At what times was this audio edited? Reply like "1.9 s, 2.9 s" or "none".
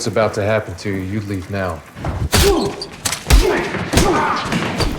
none